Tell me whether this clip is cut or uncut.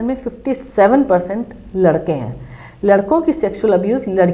uncut